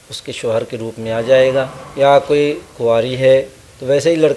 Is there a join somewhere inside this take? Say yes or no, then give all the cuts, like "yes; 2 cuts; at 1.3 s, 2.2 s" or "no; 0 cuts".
yes; 1 cut; at 1.8 s